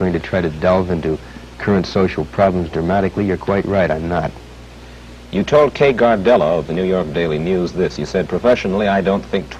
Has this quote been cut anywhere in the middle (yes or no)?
no